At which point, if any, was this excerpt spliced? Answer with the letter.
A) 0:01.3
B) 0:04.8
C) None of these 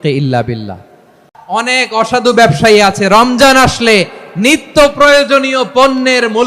A